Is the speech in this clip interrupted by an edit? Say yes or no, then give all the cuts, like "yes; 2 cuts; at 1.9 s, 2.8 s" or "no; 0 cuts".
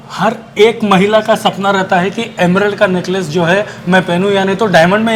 no; 0 cuts